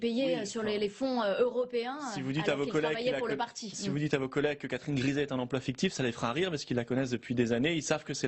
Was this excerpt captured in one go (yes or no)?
no